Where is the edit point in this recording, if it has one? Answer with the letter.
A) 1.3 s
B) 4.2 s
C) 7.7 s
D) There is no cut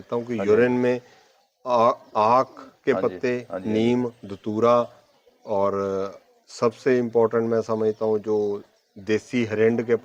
D